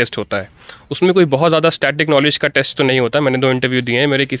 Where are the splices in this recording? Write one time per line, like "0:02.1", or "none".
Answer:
none